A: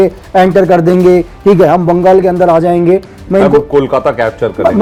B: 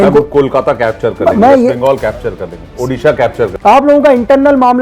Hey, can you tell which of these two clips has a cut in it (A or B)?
B